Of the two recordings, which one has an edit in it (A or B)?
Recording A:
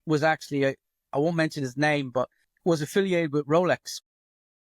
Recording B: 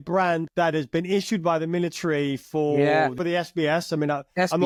A